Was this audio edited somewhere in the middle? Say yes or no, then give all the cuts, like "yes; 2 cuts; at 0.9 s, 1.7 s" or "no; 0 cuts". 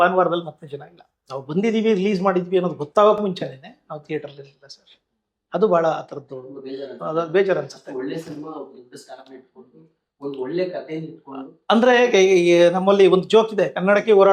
no; 0 cuts